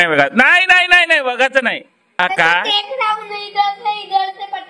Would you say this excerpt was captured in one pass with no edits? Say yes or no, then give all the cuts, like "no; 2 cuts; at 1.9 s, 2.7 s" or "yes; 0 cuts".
no; 1 cut; at 2.2 s